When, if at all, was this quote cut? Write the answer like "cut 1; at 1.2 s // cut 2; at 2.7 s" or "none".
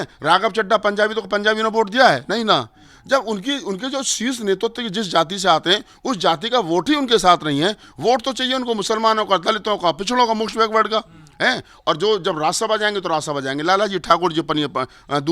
none

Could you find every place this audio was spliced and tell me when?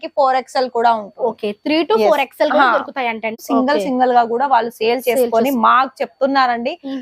cut 1; at 3.4 s

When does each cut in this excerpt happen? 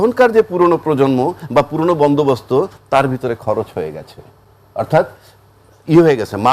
none

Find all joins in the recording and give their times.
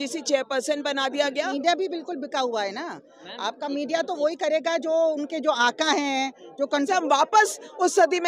cut 1; at 1.5 s // cut 2; at 6.9 s

